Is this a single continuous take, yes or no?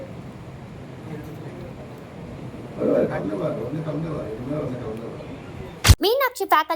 no